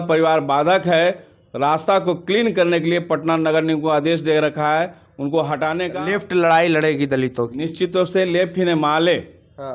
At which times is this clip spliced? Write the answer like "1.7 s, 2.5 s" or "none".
5.9 s